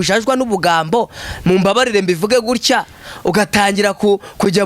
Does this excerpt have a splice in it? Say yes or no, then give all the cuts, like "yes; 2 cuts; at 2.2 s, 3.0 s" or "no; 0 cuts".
no; 0 cuts